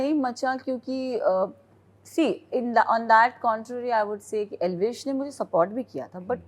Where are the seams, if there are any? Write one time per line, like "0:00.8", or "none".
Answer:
none